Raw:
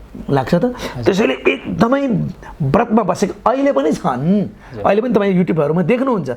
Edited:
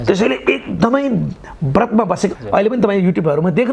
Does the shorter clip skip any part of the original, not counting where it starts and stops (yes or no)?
yes